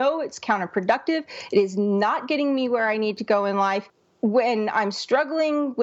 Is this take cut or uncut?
cut